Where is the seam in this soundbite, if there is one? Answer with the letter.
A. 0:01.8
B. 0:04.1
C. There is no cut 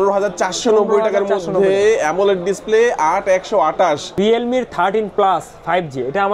B